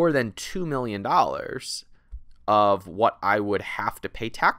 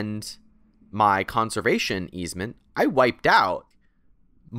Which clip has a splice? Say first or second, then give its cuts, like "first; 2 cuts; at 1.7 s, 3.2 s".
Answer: second; 1 cut; at 3.7 s